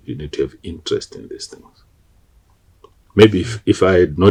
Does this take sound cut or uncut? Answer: uncut